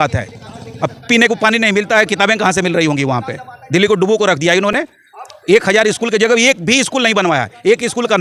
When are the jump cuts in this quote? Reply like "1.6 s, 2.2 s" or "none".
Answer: none